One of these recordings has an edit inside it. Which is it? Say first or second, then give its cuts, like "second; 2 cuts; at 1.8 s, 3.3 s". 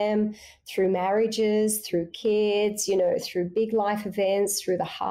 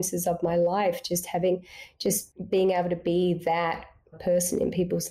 second; 2 cuts; at 2.3 s, 4.2 s